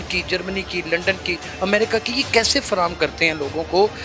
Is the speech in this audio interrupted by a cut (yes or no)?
no